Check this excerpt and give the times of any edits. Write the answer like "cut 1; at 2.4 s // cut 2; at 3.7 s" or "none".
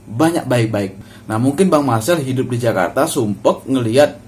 cut 1; at 1.0 s